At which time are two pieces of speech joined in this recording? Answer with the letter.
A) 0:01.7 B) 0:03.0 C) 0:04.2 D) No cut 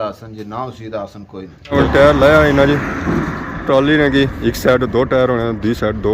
A